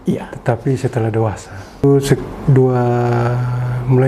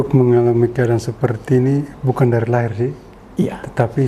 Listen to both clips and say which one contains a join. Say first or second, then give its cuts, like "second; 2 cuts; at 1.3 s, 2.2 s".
first; 1 cut; at 1.8 s